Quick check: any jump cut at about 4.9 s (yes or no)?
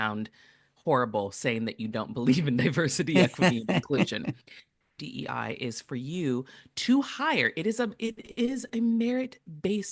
yes